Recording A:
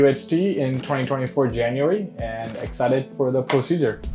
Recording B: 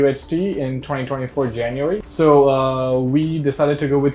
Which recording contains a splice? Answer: B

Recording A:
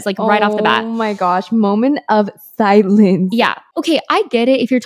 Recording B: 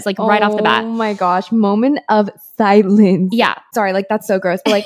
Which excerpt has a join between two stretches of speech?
B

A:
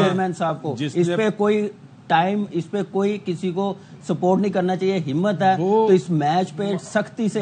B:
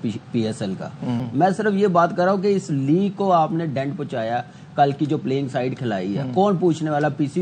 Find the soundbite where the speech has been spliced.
B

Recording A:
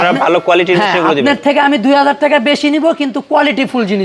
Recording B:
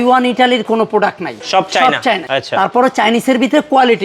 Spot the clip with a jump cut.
B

